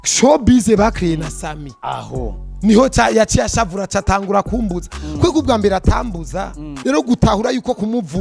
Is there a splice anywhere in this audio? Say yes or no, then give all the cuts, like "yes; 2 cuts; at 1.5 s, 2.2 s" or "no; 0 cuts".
yes; 1 cut; at 6.6 s